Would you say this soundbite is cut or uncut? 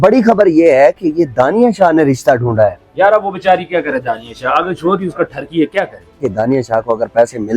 cut